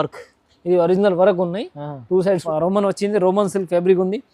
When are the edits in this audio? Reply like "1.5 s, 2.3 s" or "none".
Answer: 2.4 s